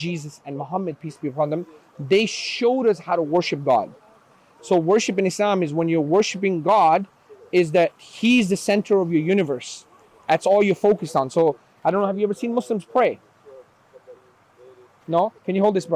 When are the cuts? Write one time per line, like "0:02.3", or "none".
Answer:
none